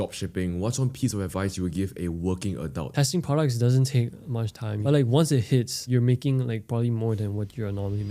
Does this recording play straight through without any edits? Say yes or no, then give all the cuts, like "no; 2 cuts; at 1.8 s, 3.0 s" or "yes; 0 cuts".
no; 2 cuts; at 2.9 s, 5.9 s